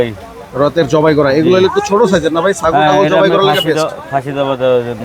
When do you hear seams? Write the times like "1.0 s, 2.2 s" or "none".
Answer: none